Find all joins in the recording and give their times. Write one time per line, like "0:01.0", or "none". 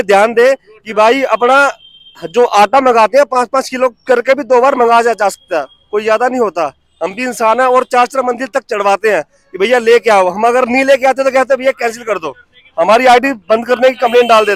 none